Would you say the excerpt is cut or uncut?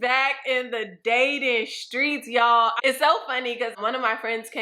cut